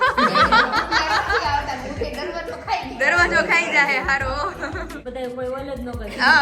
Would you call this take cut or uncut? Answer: cut